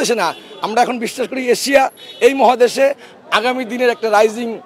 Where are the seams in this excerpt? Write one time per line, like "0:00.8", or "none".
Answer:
none